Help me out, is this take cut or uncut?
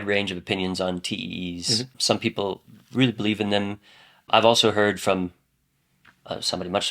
cut